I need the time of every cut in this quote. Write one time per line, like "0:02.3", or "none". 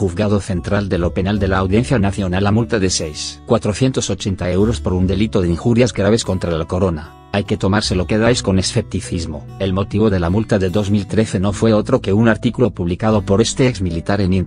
0:04.9